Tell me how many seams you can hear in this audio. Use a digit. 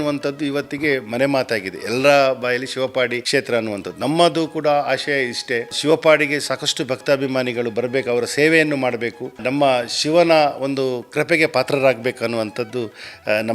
3